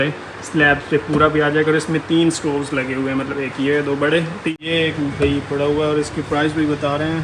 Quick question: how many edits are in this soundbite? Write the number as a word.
one